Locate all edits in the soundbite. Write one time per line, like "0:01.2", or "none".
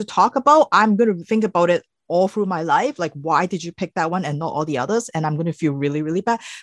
0:01.2